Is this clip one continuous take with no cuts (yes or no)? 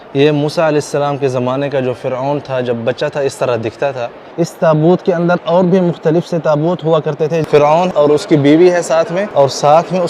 no